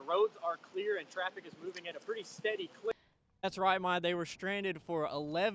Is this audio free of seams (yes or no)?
no